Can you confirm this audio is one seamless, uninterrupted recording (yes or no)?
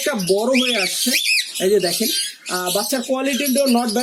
yes